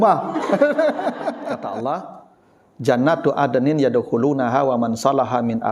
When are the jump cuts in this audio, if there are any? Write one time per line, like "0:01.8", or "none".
0:01.4